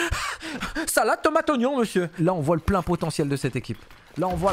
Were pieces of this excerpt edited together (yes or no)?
yes